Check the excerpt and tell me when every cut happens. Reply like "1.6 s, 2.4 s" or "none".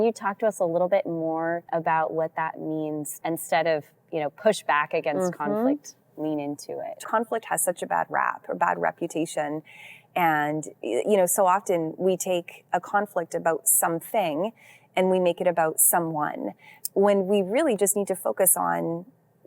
1.6 s, 3.1 s, 7.0 s